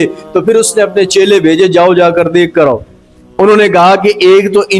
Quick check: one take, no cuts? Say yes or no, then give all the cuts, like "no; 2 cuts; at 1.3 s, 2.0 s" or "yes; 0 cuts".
yes; 0 cuts